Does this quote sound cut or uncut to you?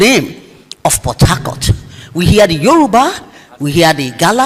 uncut